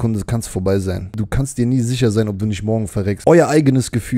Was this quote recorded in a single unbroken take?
no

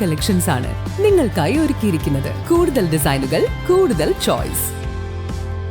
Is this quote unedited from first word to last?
no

